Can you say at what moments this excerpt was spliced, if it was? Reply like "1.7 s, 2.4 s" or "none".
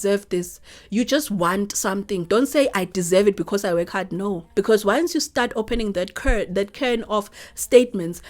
4.4 s